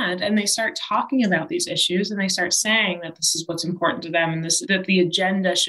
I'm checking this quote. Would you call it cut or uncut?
uncut